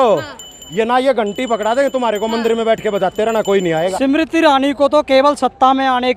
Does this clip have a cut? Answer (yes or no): yes